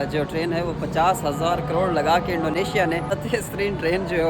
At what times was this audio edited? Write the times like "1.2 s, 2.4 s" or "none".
3.1 s